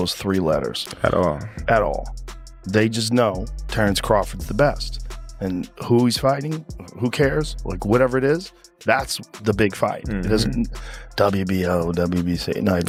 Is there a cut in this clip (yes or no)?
no